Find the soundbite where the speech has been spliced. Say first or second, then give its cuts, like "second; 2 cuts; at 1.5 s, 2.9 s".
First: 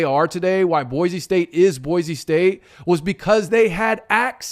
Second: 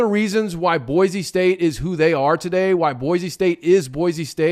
first; 1 cut; at 3.5 s